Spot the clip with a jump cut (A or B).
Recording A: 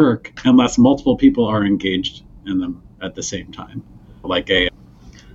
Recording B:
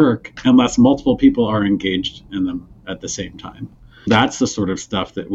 B